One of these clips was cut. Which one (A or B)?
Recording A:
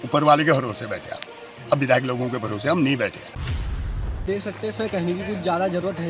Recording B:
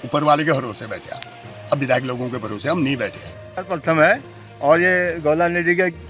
A